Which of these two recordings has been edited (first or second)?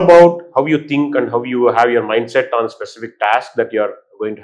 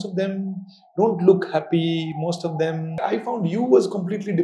second